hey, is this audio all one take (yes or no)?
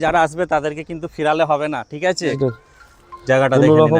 no